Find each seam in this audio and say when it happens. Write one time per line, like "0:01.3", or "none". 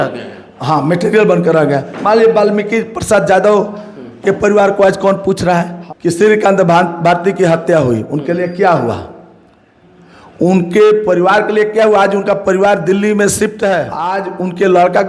0:05.8
0:14.2